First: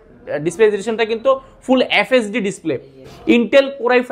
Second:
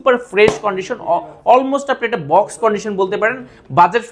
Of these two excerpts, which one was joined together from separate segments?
first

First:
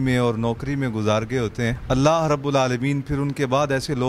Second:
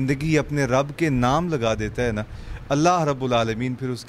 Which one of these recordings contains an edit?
first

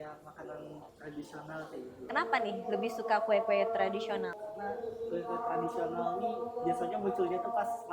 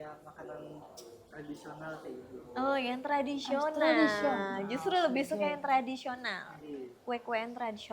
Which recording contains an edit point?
first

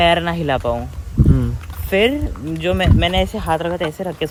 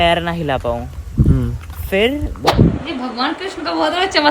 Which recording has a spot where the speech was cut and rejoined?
second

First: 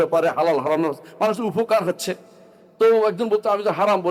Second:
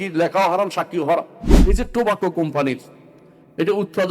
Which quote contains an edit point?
second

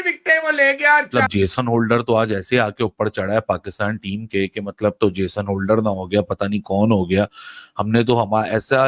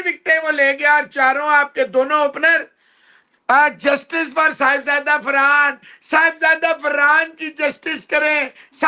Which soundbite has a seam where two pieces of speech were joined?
first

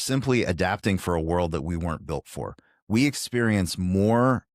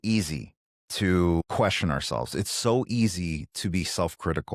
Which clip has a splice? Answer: second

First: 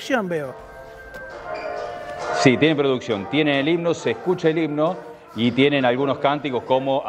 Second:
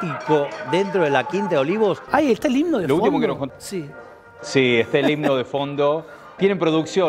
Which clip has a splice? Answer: second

